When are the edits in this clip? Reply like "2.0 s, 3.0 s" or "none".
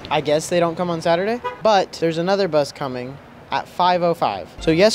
none